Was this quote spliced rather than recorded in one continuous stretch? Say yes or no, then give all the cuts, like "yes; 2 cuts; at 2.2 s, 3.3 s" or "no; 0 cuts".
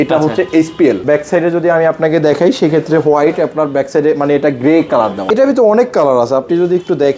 yes; 2 cuts; at 1.0 s, 5.2 s